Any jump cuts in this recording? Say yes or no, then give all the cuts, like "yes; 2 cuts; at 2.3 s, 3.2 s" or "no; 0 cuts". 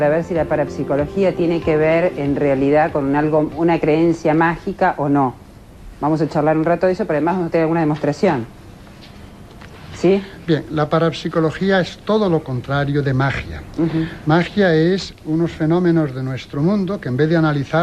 no; 0 cuts